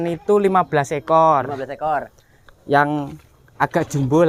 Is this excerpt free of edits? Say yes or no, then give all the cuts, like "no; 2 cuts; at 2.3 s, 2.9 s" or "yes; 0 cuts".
yes; 0 cuts